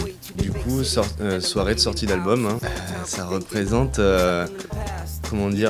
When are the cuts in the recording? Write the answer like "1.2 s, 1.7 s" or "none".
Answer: none